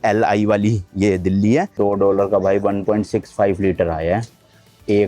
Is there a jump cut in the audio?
yes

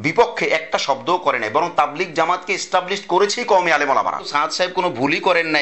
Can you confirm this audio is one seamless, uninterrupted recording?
no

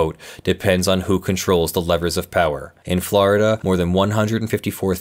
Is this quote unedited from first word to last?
no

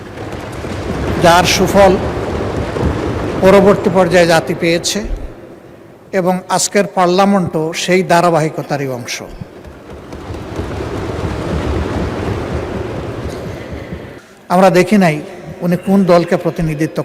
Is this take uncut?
no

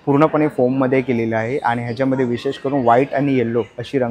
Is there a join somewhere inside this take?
no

